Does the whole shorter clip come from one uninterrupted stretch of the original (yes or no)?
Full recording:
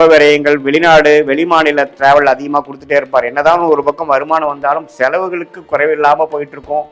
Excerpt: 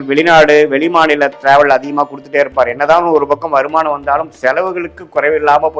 yes